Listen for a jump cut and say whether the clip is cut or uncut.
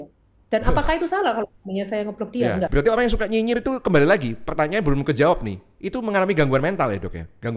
cut